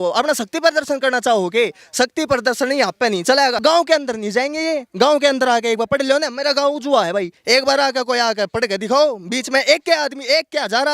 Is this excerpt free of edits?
no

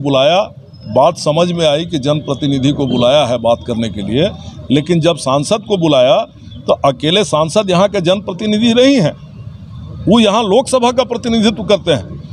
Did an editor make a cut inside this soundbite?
no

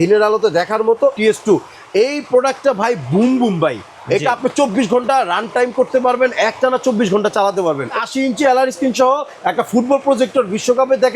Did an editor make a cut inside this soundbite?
yes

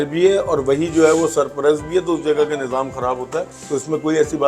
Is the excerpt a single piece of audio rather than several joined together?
no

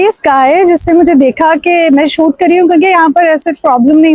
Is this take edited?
no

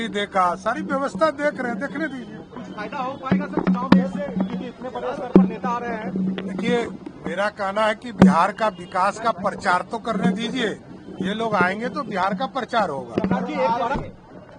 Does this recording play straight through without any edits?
yes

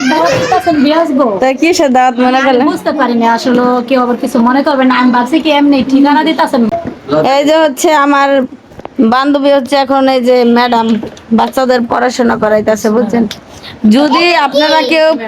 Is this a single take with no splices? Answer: no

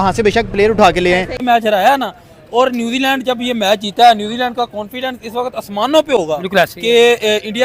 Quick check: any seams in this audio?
no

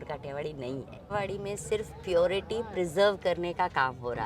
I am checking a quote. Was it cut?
yes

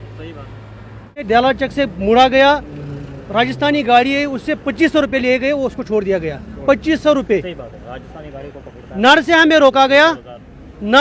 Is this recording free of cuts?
no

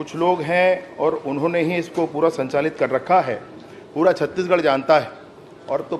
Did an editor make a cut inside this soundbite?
no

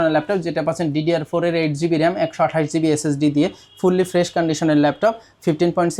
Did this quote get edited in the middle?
no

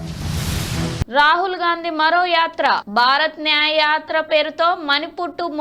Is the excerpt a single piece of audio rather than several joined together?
no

